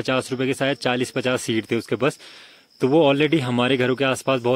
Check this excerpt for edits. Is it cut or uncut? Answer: uncut